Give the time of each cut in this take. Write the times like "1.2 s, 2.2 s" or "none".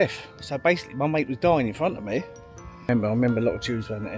2.9 s